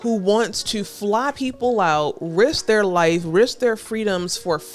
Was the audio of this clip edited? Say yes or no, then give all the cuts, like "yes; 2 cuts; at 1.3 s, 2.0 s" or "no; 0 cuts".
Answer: no; 0 cuts